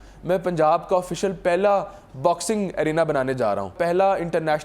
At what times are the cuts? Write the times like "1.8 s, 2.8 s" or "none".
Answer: 3.7 s